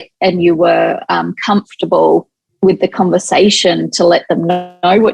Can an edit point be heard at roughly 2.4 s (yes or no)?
yes